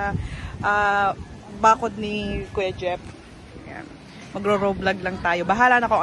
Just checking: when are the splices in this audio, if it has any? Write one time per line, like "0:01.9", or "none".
none

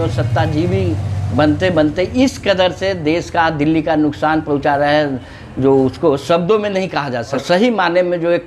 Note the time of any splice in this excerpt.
0:07.4

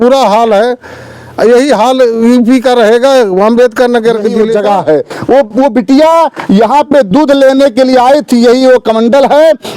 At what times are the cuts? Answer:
0:04.5

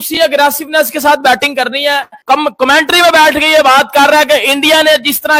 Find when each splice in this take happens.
none

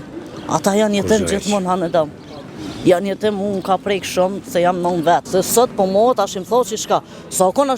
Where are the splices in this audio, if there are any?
0:05.3

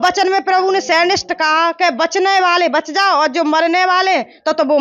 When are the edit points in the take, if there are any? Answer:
none

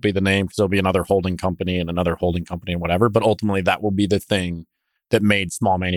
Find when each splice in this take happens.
none

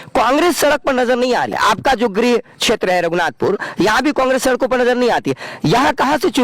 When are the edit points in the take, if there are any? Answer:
0:01.5

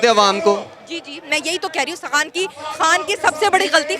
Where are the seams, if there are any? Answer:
none

